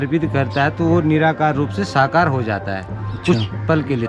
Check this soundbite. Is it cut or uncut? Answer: uncut